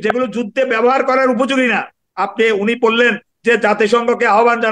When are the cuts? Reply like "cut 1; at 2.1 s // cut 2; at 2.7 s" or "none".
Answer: none

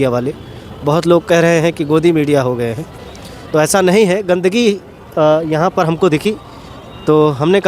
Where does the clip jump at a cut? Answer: none

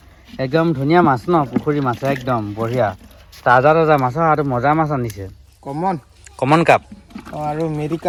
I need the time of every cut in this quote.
none

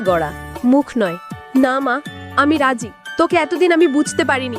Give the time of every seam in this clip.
cut 1; at 1.4 s // cut 2; at 3.0 s

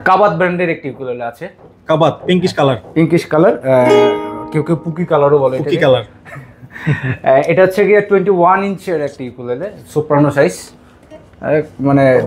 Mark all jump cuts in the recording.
none

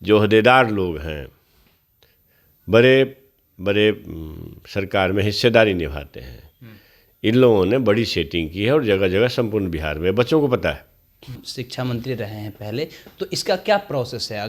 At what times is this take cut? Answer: cut 1; at 11.5 s

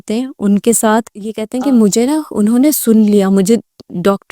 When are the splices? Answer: cut 1; at 1.4 s

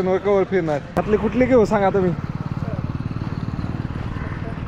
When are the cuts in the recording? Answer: cut 1; at 1.0 s

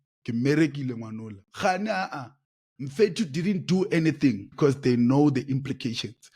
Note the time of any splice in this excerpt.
cut 1; at 4.5 s

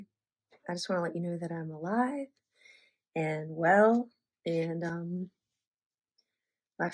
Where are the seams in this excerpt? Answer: none

